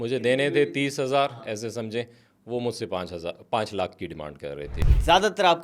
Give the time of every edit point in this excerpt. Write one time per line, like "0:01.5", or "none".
0:04.7